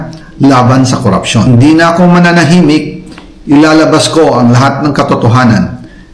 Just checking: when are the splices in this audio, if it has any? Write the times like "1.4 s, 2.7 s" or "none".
1.5 s